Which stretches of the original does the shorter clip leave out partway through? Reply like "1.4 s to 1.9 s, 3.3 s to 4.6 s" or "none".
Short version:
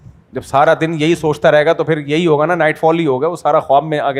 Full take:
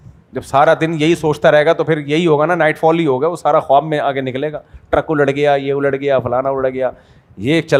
none